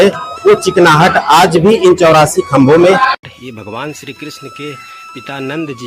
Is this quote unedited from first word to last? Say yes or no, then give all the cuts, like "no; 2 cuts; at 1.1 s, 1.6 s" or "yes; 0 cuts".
no; 1 cut; at 3.2 s